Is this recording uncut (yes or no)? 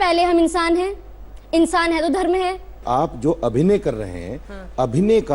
no